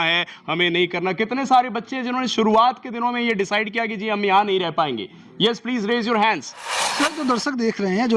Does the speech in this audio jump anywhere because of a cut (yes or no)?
yes